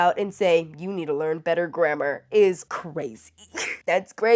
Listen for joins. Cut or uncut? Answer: uncut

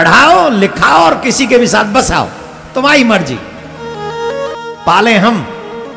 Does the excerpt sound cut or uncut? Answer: cut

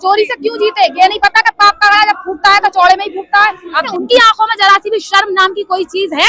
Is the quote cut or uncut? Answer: cut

